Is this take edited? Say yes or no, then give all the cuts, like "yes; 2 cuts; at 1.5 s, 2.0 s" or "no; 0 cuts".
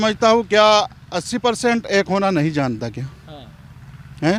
no; 0 cuts